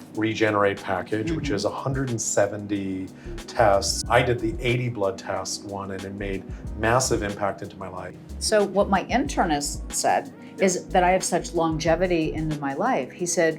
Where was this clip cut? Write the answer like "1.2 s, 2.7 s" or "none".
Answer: 4.0 s, 8.2 s